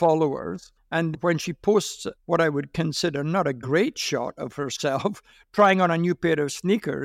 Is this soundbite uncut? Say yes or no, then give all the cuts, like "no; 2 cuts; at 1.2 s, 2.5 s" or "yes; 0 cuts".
yes; 0 cuts